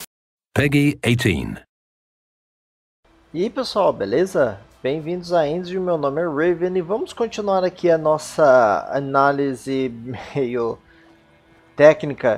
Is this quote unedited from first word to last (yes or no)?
yes